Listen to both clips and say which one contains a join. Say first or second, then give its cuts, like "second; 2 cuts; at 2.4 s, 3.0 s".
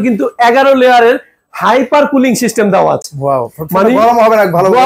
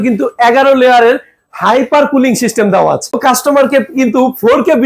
second; 1 cut; at 3.2 s